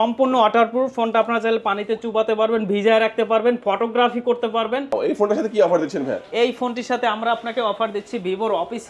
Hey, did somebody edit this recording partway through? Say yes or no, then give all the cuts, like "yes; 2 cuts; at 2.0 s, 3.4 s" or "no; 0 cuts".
yes; 1 cut; at 4.9 s